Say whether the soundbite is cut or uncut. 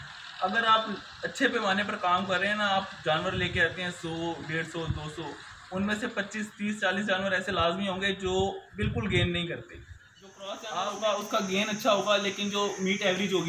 cut